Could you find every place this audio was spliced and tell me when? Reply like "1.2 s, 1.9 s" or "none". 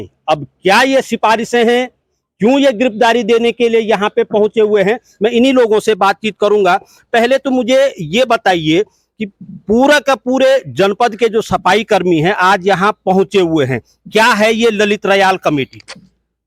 none